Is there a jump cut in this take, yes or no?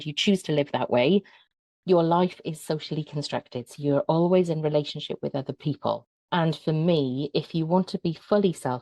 yes